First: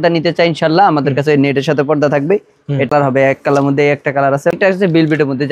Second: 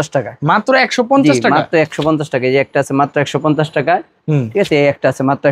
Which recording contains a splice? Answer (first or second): first